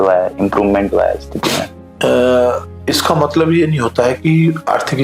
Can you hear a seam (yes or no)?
no